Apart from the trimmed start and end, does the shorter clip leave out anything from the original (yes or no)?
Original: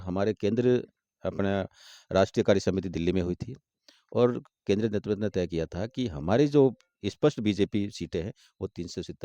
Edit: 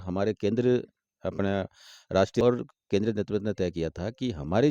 yes